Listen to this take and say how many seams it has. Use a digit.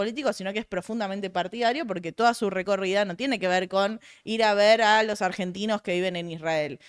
0